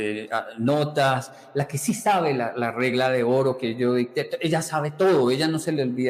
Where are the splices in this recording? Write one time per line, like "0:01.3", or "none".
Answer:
none